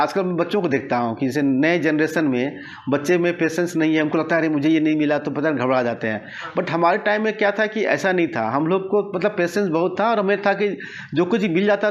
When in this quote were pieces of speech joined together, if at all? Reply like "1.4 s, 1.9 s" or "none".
none